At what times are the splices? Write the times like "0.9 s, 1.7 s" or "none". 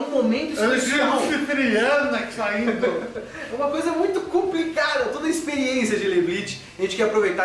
none

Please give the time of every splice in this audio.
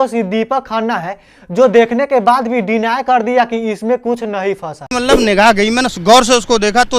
4.9 s

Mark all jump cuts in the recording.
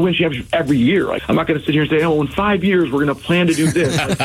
1.2 s

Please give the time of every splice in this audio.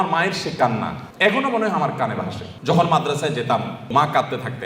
1.0 s, 2.4 s, 3.9 s

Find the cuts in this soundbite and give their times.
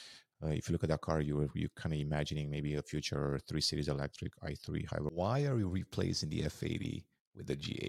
5.1 s

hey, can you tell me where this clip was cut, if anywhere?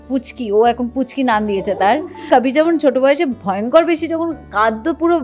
2.2 s

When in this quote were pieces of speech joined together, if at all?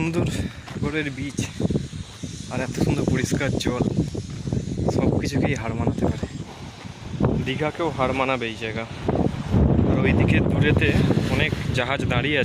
0.8 s, 6.4 s, 9.6 s

